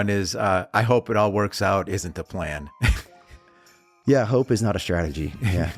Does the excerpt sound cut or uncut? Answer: uncut